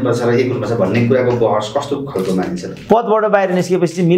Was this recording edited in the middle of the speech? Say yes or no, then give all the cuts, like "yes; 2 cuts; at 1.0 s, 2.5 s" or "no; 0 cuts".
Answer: yes; 1 cut; at 2.7 s